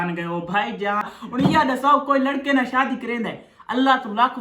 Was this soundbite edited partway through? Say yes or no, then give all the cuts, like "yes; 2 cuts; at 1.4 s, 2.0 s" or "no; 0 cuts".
yes; 1 cut; at 1.2 s